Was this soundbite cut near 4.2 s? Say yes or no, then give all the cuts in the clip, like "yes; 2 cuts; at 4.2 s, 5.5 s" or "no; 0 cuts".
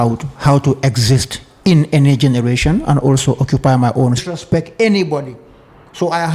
yes; 1 cut; at 4.2 s